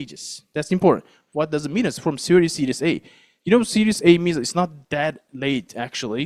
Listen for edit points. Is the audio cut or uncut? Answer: uncut